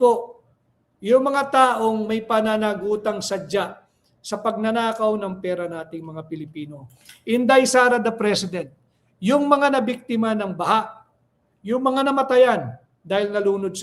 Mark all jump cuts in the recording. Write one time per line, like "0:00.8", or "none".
none